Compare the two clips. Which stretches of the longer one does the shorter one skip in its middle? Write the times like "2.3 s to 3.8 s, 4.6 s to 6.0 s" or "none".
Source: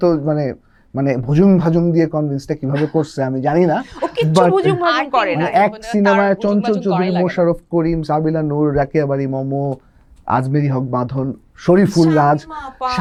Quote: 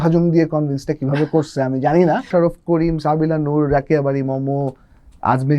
3.9 s to 7.3 s